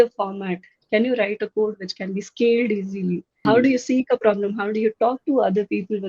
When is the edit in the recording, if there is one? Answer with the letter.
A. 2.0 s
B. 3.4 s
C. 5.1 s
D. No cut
B